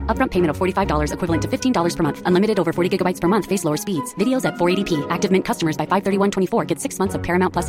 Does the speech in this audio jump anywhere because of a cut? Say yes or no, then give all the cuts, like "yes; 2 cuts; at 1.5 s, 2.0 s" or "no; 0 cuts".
no; 0 cuts